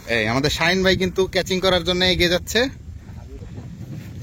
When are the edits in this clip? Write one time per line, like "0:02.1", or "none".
0:03.3